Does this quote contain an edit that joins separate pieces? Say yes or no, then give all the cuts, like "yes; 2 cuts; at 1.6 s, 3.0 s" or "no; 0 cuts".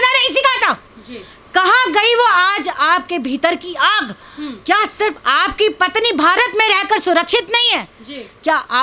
no; 0 cuts